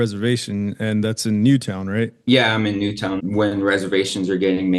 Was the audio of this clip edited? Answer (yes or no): yes